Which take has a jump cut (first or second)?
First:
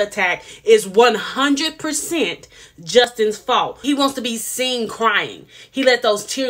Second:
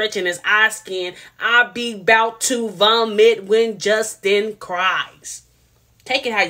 first